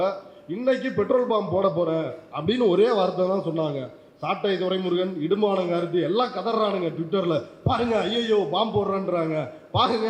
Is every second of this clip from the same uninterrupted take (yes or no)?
yes